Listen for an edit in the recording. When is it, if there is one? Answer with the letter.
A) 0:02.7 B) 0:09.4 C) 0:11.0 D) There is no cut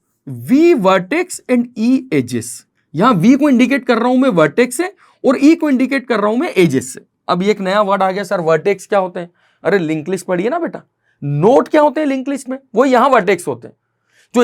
D